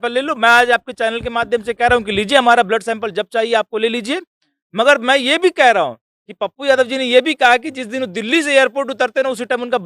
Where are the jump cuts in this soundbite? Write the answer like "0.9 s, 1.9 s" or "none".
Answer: none